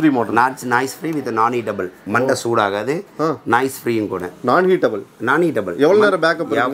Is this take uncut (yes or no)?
yes